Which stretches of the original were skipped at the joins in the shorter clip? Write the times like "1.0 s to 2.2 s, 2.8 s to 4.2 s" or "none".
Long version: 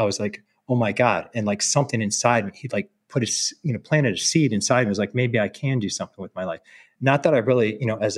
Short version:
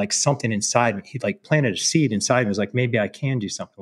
2.9 s to 3.8 s